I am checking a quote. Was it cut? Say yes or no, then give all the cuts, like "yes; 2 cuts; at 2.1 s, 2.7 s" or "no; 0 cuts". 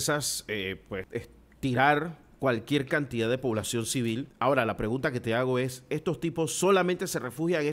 yes; 2 cuts; at 1.1 s, 4.3 s